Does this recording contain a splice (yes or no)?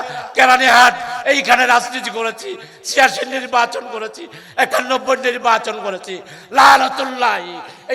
no